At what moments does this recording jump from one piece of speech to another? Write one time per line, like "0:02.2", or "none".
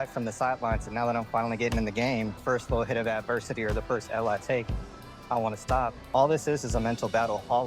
0:02.4
0:06.0